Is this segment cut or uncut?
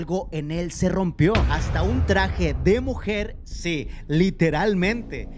cut